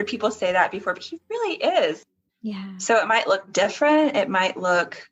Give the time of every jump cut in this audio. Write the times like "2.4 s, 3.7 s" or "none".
2.1 s

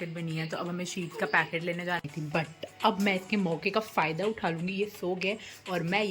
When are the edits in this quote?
2.0 s

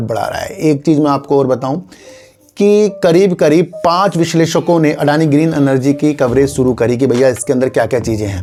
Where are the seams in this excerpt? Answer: none

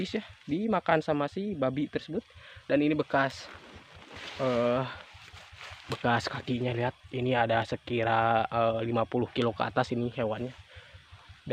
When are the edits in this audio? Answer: none

